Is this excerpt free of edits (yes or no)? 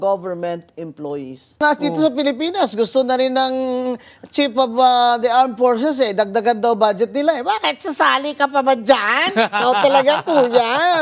no